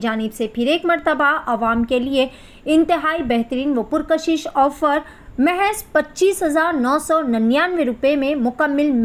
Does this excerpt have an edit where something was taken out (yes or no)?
no